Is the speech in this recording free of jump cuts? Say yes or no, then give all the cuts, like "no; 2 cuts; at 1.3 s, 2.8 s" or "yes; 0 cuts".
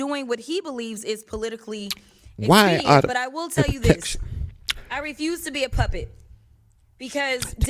yes; 0 cuts